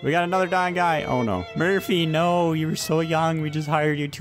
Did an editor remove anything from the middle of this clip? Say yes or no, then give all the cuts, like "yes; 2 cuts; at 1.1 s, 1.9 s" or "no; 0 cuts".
yes; 1 cut; at 1.5 s